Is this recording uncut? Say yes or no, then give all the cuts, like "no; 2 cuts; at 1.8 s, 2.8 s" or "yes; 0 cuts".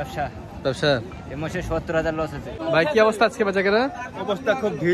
no; 1 cut; at 2.6 s